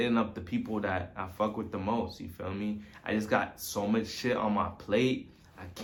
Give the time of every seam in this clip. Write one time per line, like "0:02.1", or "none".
none